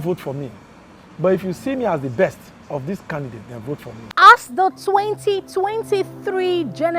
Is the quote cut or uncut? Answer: cut